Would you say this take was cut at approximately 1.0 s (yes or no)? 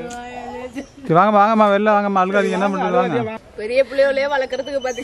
no